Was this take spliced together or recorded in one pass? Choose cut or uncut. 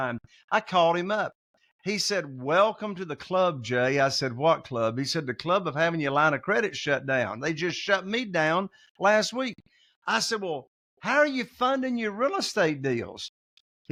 uncut